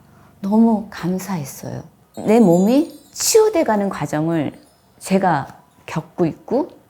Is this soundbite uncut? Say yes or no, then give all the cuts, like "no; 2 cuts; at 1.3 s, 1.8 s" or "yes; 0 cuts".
no; 1 cut; at 2.0 s